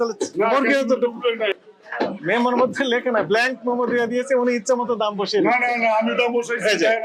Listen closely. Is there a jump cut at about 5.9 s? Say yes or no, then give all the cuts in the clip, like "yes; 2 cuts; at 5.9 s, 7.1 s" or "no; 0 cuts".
no; 1 cut; at 1.5 s